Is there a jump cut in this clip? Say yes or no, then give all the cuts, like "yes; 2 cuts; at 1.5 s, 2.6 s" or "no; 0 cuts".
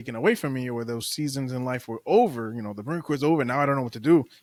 no; 0 cuts